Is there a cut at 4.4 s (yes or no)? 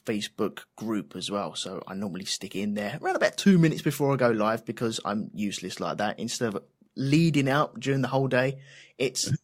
no